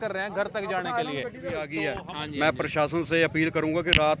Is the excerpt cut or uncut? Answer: cut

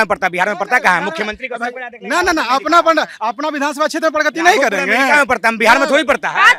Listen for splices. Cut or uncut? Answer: uncut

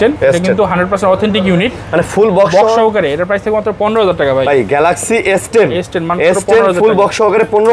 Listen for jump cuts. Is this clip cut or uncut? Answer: uncut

